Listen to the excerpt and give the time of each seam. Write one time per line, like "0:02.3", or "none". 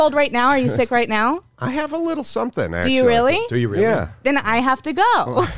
none